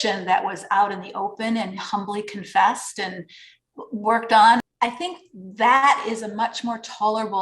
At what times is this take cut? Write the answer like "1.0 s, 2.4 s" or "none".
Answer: 4.6 s